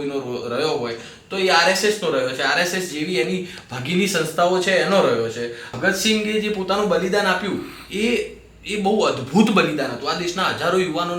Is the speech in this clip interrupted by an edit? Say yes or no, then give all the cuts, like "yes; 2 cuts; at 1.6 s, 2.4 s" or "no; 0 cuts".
yes; 1 cut; at 5.7 s